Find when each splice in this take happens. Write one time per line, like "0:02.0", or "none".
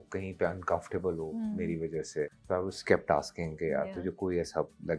0:02.4